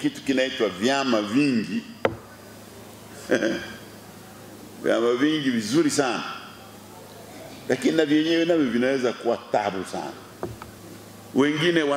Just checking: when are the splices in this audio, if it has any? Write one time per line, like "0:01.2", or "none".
0:10.8